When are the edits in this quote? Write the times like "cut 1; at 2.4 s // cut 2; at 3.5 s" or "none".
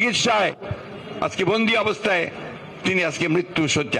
none